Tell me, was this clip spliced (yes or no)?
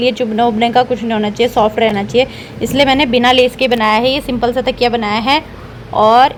no